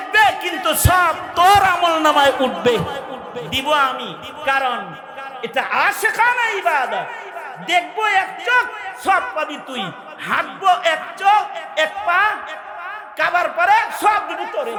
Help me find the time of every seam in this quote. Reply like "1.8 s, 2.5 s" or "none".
none